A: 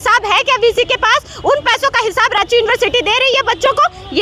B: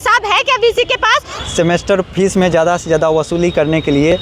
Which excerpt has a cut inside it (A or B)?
B